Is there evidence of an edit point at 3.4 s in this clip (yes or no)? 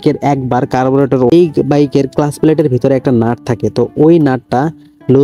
no